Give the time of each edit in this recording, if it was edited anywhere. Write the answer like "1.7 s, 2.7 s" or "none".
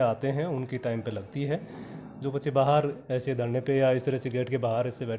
none